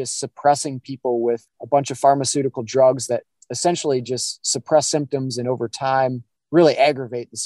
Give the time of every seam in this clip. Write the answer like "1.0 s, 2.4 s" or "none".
1.5 s, 6.3 s